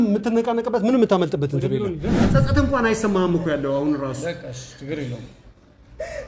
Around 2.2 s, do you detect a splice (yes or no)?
yes